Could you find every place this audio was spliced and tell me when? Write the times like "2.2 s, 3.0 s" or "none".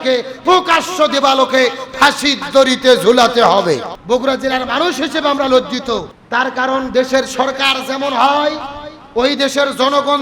3.9 s, 6.2 s